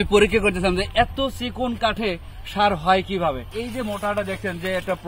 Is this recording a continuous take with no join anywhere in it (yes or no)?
no